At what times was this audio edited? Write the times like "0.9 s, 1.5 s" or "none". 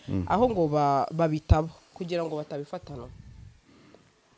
none

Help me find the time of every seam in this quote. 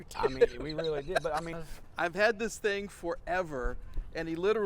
1.5 s

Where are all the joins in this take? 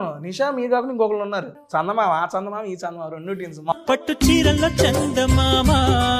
1.6 s, 3.7 s

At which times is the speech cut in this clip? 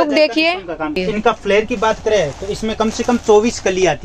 1.0 s

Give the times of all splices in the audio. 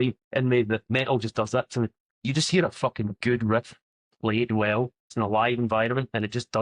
0.9 s, 2.1 s, 5.1 s

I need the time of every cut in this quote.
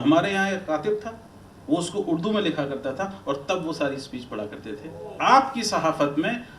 5.1 s

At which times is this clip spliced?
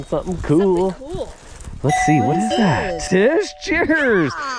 3.0 s

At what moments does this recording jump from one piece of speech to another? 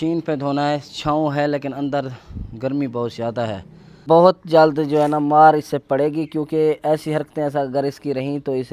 4.0 s

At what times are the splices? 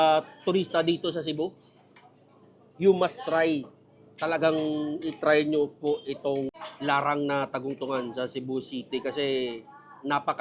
6.6 s

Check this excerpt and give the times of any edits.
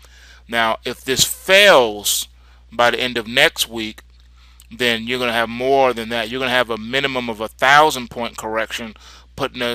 none

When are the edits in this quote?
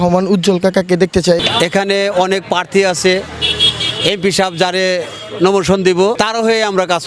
1.4 s, 6.2 s

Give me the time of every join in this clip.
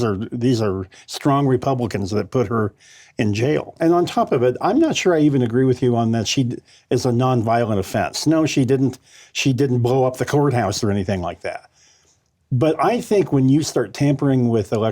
3.7 s

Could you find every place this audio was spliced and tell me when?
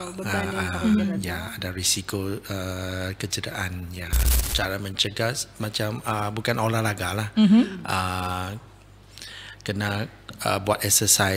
4.4 s

